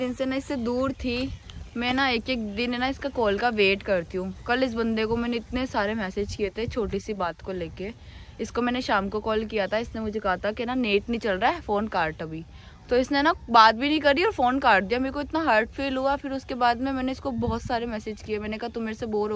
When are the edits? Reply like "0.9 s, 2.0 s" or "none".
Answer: none